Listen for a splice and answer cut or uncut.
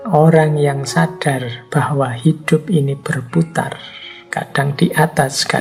uncut